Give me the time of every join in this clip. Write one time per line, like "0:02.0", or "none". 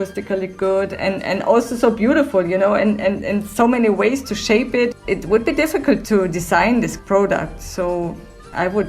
0:05.0
0:07.0

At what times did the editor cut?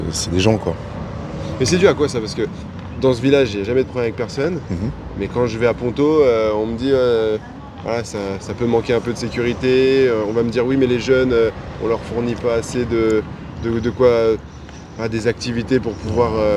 none

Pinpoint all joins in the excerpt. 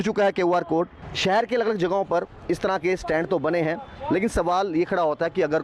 0:01.0

